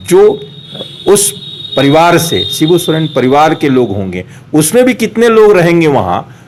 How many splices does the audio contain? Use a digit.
0